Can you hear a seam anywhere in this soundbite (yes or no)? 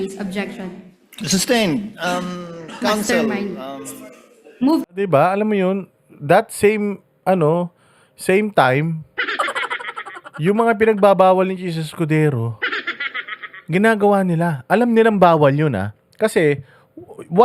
no